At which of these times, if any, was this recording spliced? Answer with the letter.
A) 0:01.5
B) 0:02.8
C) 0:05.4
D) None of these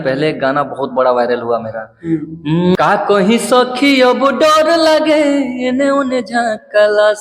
B